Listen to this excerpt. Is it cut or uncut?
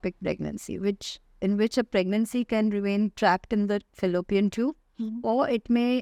uncut